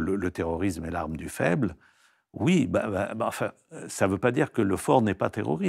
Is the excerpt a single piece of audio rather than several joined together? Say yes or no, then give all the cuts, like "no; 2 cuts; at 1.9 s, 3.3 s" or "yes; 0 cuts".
yes; 0 cuts